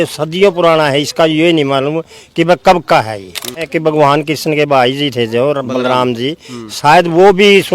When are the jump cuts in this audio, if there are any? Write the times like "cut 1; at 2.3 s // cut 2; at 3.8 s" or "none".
cut 1; at 3.7 s